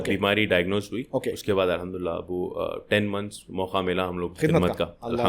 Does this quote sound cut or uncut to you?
uncut